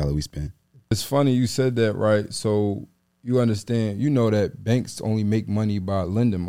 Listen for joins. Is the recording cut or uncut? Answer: cut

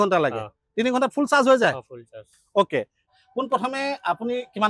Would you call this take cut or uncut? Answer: cut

